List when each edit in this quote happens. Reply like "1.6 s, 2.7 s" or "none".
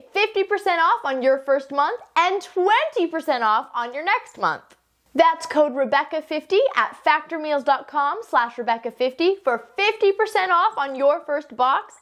none